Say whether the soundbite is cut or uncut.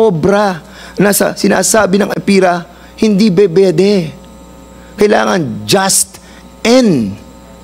uncut